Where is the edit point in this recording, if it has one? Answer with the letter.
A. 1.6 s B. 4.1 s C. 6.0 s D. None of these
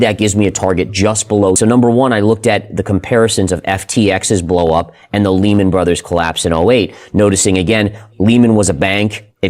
A